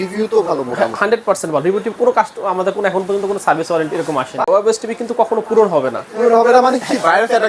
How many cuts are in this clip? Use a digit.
1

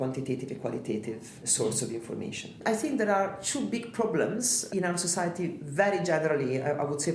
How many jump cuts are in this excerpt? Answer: 3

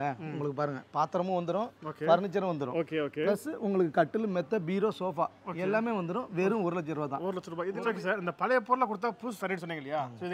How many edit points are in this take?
1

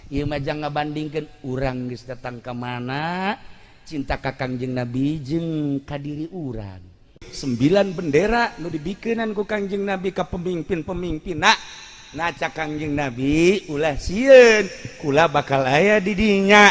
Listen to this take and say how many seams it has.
1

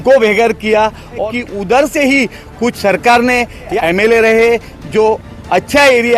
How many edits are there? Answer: 3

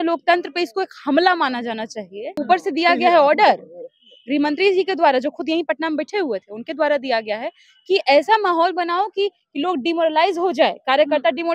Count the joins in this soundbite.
1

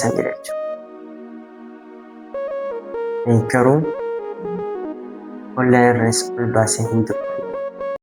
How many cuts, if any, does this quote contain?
0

